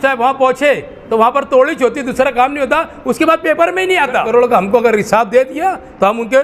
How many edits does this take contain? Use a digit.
1